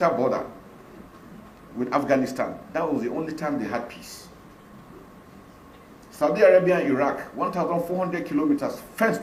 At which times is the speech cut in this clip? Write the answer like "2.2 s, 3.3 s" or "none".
none